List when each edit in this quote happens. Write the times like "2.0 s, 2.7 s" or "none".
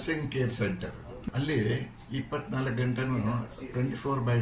1.2 s